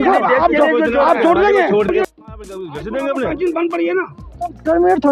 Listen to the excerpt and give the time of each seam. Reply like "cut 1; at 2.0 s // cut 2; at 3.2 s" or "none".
cut 1; at 1.9 s